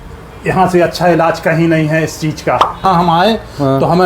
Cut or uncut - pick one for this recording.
cut